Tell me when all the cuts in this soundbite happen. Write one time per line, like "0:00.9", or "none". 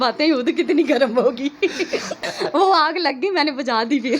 0:02.2